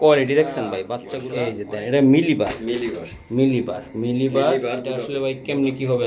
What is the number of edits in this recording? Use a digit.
2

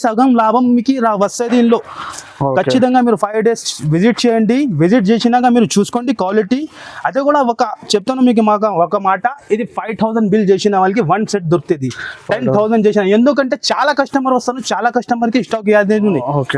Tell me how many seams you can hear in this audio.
0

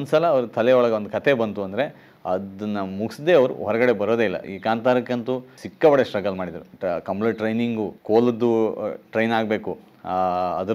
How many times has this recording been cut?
4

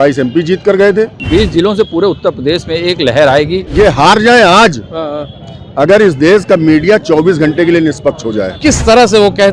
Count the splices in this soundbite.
3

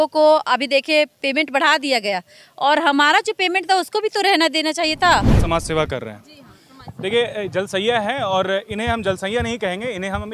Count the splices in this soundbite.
1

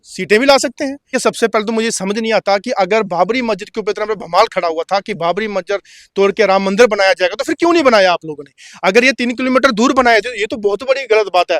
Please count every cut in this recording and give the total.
1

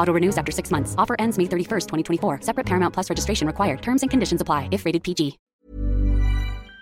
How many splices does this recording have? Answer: 1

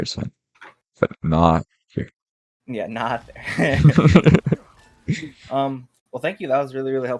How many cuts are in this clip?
1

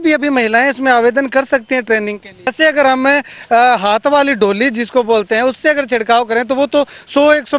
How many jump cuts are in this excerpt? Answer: 1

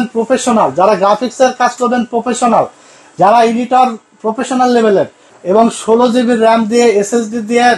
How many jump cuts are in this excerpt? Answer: 1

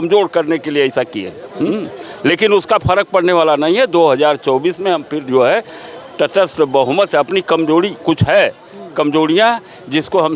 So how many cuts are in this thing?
0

